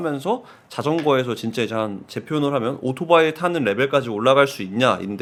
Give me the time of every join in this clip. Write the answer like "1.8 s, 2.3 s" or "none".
none